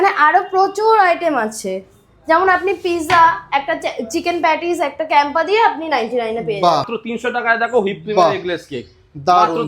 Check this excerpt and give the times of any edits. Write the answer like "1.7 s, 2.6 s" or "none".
7.0 s